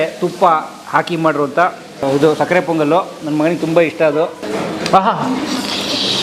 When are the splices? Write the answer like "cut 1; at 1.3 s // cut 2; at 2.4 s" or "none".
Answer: cut 1; at 2.0 s // cut 2; at 4.4 s

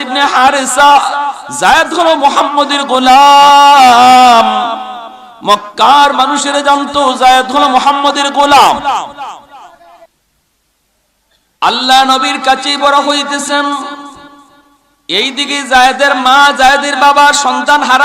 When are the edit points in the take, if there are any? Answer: cut 1; at 10.1 s

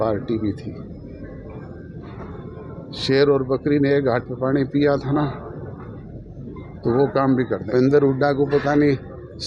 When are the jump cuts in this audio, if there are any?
cut 1; at 7.7 s

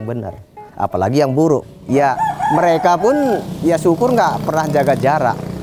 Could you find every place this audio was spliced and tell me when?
cut 1; at 1.7 s // cut 2; at 3.5 s

